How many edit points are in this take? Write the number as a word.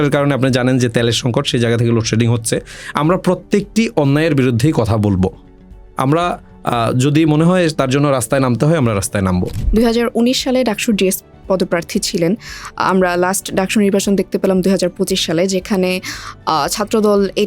one